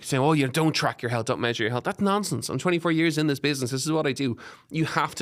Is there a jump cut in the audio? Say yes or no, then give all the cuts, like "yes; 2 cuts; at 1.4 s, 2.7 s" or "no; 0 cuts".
no; 0 cuts